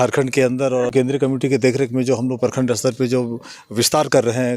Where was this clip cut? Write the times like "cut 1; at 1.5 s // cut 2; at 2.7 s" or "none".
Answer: cut 1; at 0.9 s